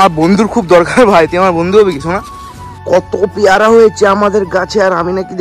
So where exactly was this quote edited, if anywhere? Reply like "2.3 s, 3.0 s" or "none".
2.8 s